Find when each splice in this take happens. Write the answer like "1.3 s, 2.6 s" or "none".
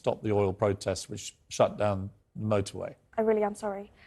3.0 s